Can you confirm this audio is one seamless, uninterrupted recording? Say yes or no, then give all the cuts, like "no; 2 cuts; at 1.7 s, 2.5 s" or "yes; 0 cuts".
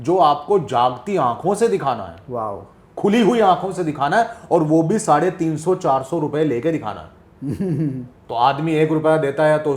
yes; 0 cuts